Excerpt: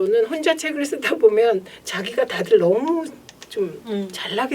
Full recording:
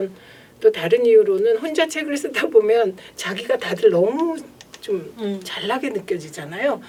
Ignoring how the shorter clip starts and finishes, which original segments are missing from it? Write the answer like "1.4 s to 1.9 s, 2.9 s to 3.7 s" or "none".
none